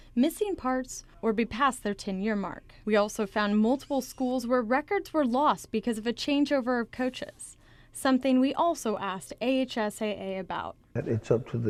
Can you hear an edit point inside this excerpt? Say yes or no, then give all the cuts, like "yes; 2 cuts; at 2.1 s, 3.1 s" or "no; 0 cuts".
no; 0 cuts